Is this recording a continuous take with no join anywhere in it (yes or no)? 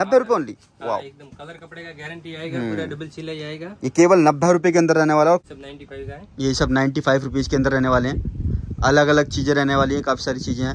no